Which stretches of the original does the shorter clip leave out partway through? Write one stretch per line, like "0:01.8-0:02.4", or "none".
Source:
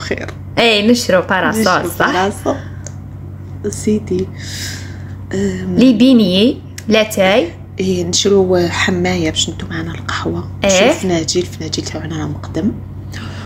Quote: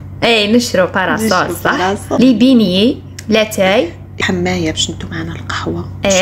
0:02.5-0:05.8
0:07.8-0:08.8